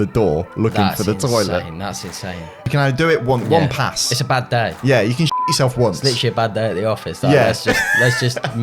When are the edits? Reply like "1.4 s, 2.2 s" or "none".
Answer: 2.7 s